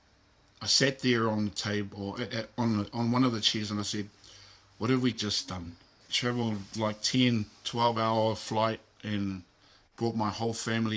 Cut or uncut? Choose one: cut